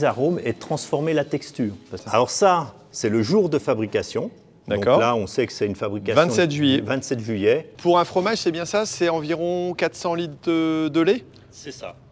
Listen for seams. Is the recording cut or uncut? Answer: cut